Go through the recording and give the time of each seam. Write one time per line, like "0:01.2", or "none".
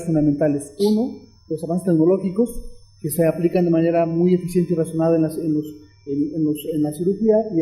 0:04.9

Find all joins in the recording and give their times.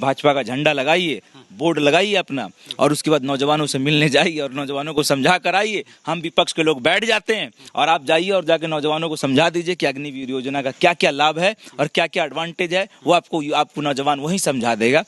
none

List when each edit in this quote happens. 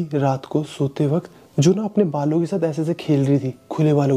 none

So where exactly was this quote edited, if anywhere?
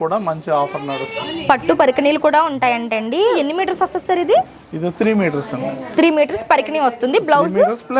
0:01.2
0:03.4

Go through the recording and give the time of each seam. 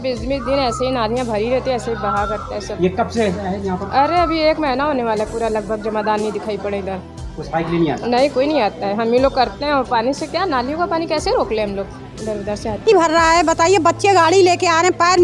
0:12.9

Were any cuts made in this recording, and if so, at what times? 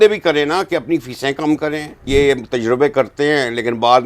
0:02.0

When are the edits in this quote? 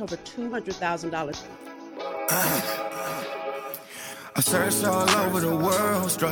0:01.6

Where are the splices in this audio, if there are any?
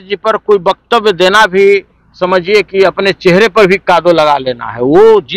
none

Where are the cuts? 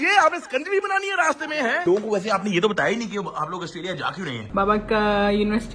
0:01.8
0:04.4

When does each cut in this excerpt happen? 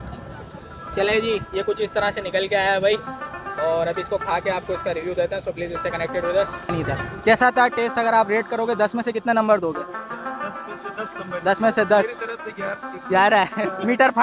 0:06.7

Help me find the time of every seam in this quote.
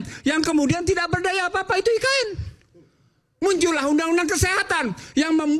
none

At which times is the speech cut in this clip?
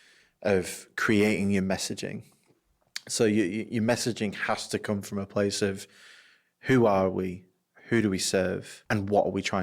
0:08.7

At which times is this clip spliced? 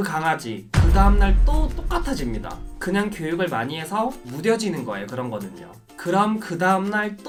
none

